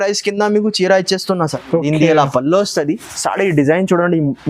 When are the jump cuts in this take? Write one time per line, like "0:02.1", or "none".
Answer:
0:01.5